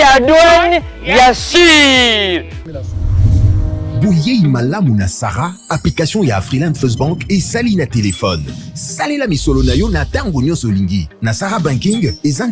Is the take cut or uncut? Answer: cut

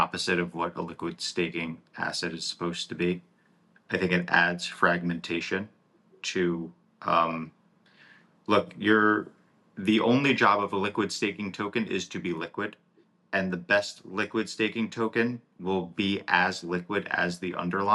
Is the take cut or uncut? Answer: uncut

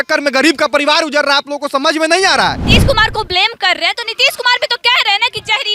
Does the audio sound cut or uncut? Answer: cut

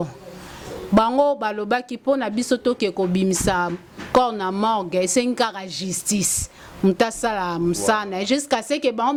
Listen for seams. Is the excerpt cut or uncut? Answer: uncut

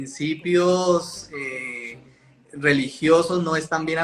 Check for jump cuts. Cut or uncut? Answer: uncut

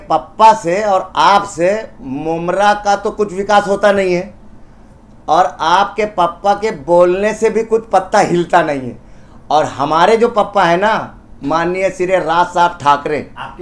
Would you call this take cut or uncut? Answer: uncut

